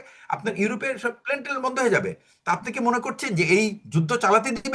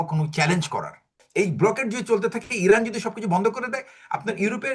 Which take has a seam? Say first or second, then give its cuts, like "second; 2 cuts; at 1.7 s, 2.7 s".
second; 1 cut; at 1.2 s